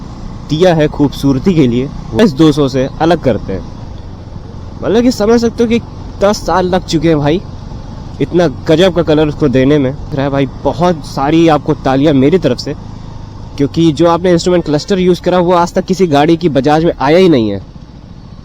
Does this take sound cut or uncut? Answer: cut